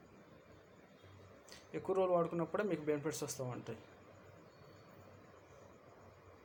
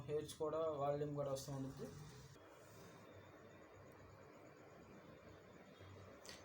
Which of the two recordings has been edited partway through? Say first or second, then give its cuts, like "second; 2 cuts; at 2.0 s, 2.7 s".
second; 1 cut; at 2.3 s